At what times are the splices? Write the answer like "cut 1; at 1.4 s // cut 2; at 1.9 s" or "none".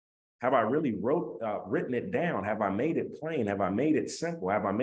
none